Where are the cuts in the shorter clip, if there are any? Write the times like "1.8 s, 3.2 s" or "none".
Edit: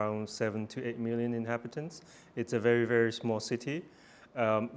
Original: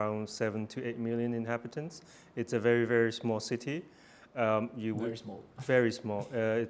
none